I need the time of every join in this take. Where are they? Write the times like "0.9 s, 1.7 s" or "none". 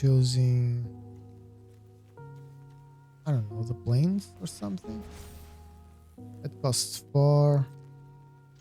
1.6 s, 3.2 s, 7.6 s